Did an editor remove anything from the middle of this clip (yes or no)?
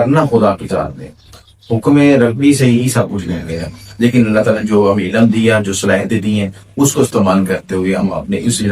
no